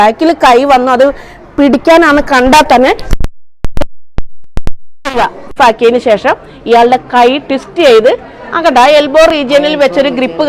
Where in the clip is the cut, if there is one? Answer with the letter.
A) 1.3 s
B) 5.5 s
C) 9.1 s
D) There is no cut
B